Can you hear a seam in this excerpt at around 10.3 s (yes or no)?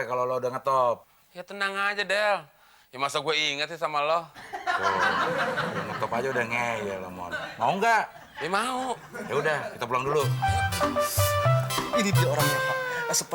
yes